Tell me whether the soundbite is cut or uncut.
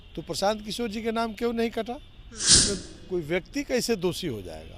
cut